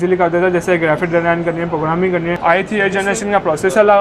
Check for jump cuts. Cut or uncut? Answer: cut